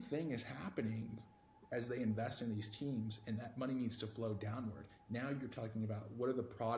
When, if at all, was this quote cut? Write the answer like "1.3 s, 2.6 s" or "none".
none

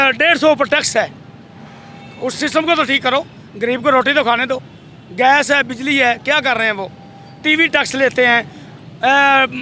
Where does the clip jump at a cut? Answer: none

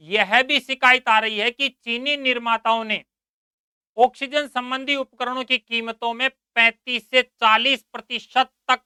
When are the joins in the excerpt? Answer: none

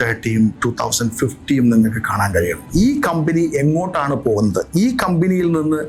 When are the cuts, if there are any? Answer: 2.6 s

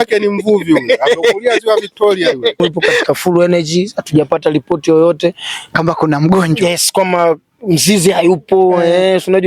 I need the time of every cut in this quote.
3.0 s

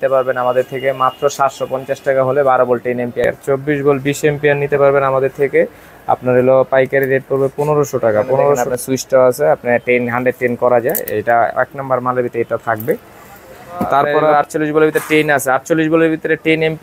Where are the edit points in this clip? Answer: 3.2 s, 8.6 s, 14.3 s

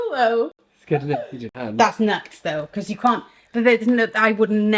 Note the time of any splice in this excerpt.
1.4 s

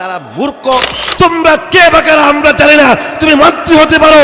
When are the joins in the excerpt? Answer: 1.0 s

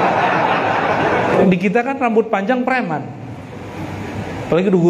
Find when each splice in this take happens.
1.3 s

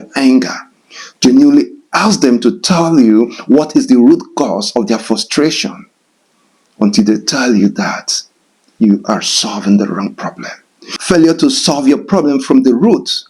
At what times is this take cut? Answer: 10.9 s

